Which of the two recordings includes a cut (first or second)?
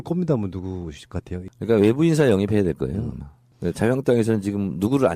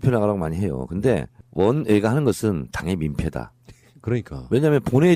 first